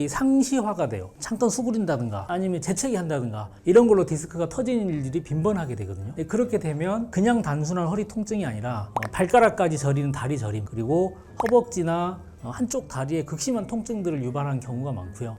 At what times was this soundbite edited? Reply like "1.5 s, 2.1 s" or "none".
1.0 s